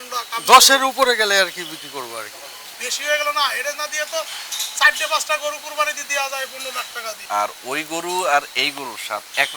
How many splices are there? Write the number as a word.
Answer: two